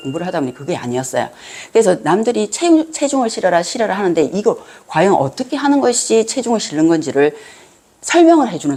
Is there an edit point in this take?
no; 0 cuts

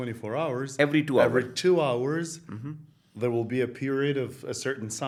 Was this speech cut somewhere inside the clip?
no; 0 cuts

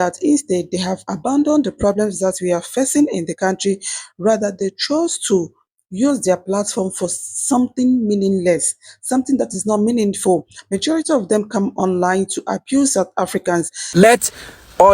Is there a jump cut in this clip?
yes; 1 cut; at 13.8 s

